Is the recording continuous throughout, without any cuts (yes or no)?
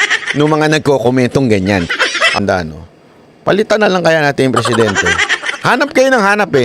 no